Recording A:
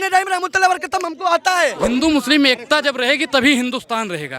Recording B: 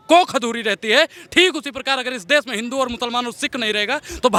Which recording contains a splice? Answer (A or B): A